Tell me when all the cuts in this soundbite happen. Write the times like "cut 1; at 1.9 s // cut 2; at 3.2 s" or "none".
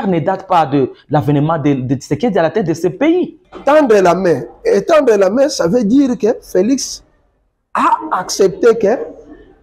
cut 1; at 3.4 s